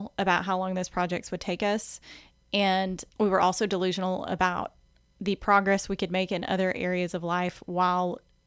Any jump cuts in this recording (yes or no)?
yes